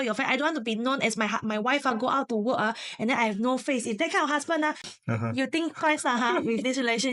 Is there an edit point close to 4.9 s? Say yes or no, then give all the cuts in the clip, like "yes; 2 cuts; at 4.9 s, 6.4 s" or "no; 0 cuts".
yes; 1 cut; at 4.9 s